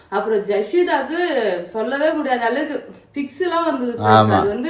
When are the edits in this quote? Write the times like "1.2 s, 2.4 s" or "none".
none

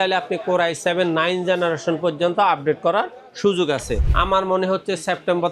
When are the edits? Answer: 4.0 s

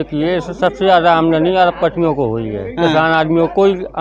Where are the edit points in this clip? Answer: none

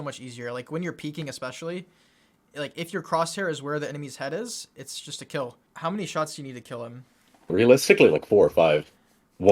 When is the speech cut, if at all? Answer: 5.6 s, 7.5 s

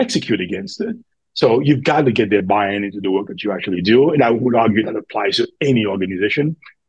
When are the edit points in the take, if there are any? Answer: none

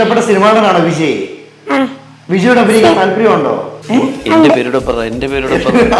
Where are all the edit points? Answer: 3.7 s

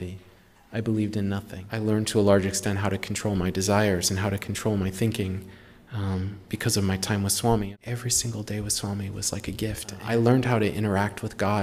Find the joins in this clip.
1.6 s, 7.7 s, 10.0 s

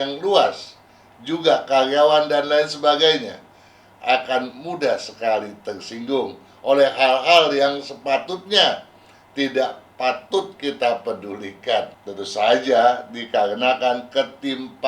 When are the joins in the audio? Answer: 12.0 s

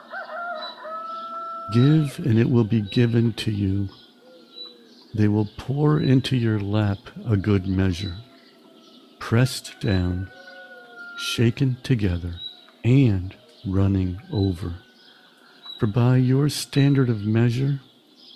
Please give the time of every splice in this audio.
1.6 s

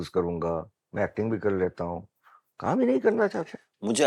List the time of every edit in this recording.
none

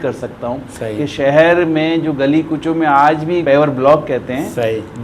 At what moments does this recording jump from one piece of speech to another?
3.4 s

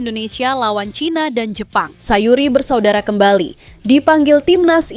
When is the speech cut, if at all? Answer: 2.0 s

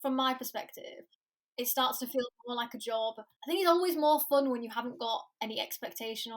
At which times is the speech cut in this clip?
3.3 s

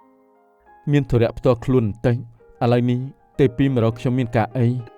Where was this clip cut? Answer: none

